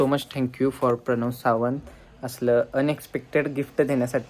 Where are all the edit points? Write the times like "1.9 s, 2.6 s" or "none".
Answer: none

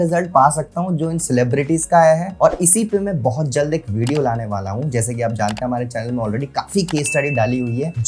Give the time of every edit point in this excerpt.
none

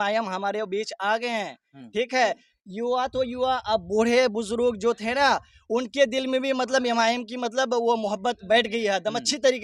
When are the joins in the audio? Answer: none

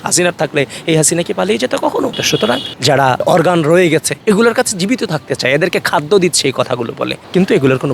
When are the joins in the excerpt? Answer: 2.7 s

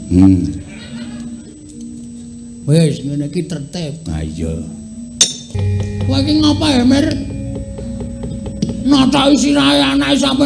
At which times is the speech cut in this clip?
5.5 s

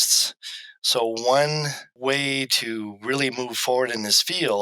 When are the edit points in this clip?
1.8 s

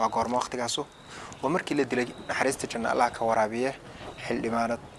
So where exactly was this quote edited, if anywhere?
none

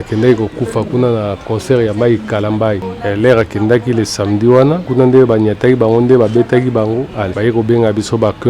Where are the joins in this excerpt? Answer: 2.9 s, 4.9 s, 7.2 s

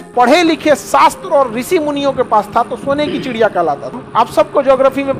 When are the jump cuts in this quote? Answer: 3.9 s

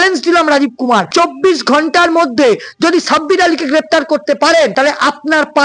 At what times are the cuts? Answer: 1.1 s, 4.7 s

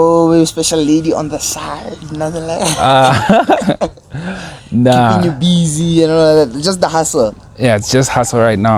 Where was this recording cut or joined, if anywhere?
none

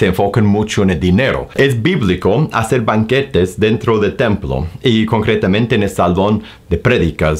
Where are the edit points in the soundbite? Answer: 1.5 s

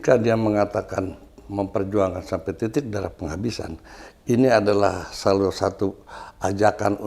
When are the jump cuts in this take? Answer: none

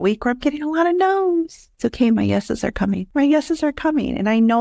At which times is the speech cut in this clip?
1.6 s, 3.1 s

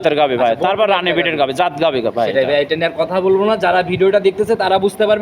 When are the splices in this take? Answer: none

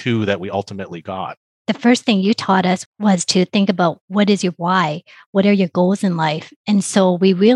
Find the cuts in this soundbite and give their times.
1.6 s, 2.9 s

